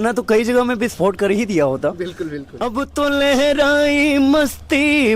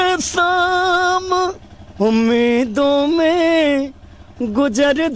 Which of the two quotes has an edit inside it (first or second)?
first